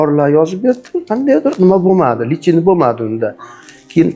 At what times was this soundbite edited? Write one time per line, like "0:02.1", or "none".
none